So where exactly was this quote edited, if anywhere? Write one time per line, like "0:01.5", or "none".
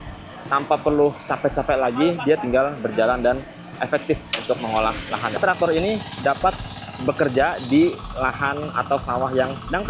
0:05.4